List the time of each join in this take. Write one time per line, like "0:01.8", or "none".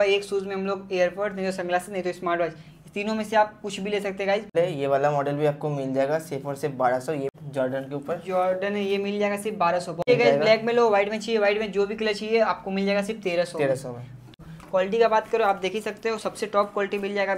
0:04.5
0:07.3
0:10.0
0:14.3